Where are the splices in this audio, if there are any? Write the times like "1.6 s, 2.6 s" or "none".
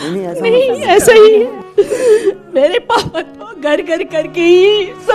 1.6 s